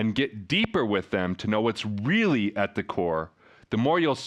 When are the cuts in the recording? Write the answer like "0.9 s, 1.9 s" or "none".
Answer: none